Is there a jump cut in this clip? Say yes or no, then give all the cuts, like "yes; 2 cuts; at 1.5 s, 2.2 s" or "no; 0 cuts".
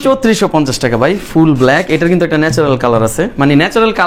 no; 0 cuts